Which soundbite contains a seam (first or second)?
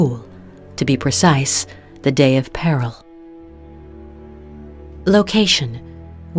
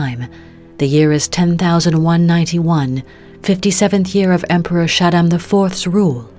first